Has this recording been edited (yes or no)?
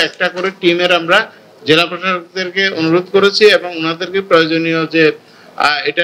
no